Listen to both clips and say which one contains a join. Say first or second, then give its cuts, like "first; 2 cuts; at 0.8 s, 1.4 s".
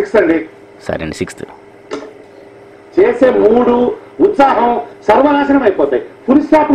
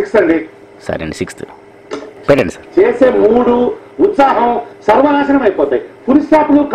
second; 1 cut; at 2.2 s